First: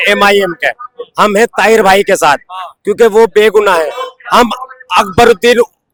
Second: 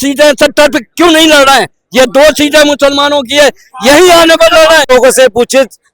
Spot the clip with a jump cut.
second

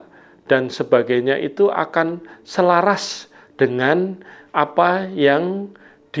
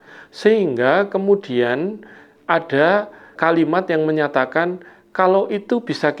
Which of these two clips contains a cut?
second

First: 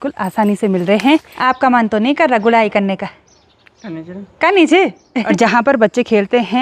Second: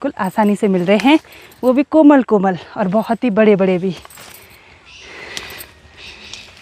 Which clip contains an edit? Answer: first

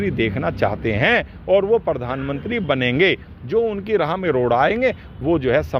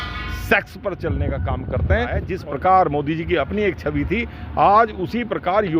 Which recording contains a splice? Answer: second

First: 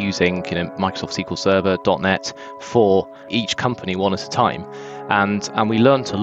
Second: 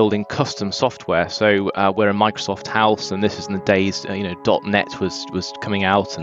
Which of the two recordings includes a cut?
first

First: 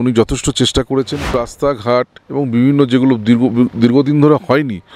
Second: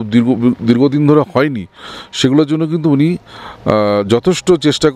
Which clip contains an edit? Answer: first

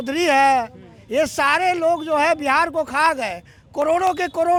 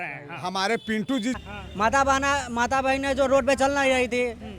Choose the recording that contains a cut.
second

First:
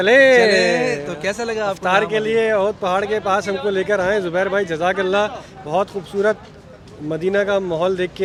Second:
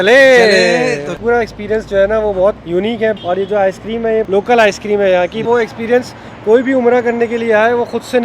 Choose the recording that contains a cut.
second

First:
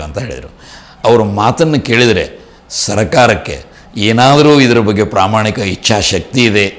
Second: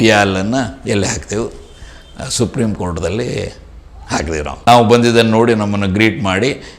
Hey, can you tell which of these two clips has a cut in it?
second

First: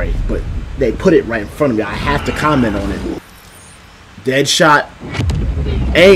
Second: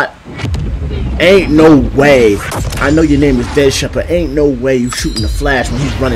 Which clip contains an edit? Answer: first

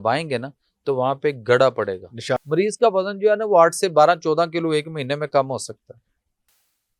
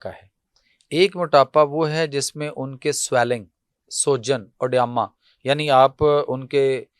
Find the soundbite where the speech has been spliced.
first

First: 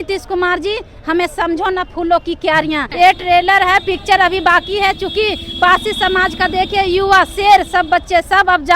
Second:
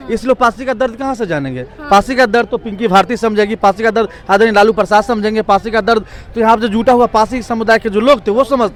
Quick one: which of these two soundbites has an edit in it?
first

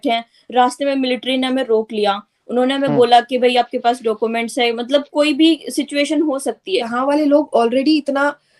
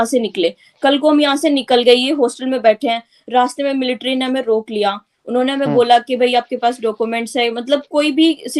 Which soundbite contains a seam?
first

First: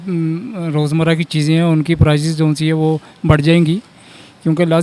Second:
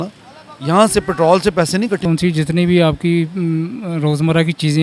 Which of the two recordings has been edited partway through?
second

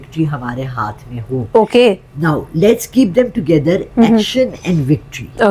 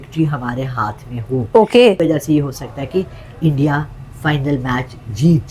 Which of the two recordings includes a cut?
second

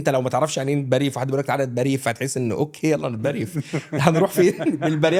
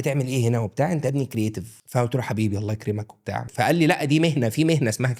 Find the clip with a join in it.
second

